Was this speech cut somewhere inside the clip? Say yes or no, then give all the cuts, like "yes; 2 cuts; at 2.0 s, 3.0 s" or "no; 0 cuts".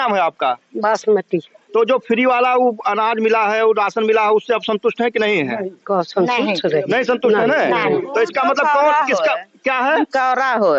no; 0 cuts